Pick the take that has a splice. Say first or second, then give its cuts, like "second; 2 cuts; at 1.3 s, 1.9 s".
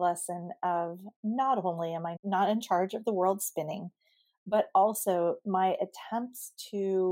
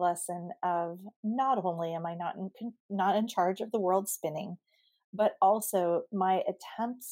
first; 1 cut; at 2.1 s